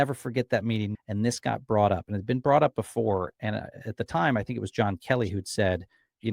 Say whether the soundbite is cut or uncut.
cut